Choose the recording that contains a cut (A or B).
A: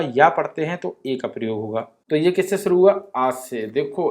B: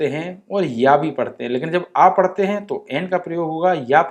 A